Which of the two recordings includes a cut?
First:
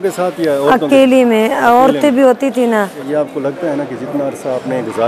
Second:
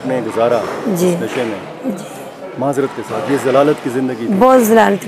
first; 1 cut; at 3.0 s

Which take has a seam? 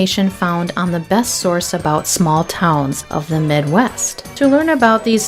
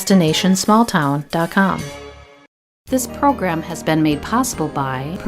second; 1 cut; at 2.3 s

